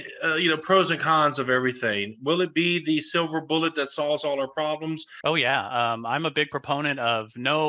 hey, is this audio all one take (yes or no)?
no